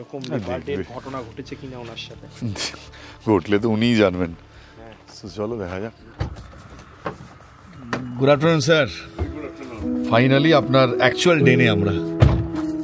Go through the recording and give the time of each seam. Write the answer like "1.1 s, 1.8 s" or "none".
6.3 s